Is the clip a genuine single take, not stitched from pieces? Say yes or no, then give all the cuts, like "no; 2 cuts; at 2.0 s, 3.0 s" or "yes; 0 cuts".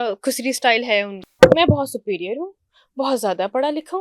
no; 1 cut; at 1.2 s